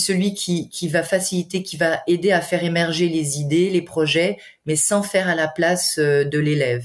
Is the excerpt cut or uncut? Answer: uncut